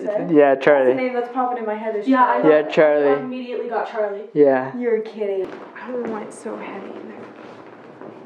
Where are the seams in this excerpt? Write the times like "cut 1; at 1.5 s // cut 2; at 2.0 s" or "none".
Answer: cut 1; at 5.6 s